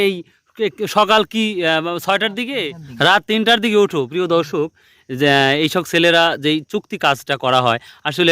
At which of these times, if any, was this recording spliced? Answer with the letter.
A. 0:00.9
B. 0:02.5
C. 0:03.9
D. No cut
B